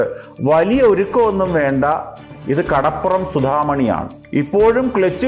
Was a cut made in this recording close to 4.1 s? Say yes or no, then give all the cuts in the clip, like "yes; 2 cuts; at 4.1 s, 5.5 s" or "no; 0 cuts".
yes; 1 cut; at 4.1 s